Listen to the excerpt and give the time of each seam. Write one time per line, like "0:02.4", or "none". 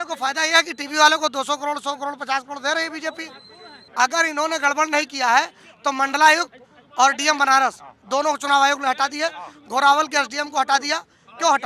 0:03.9